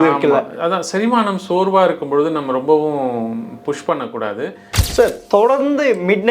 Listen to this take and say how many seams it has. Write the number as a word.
one